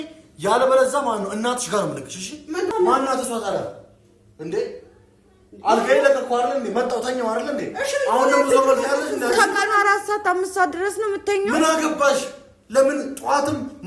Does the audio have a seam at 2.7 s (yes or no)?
yes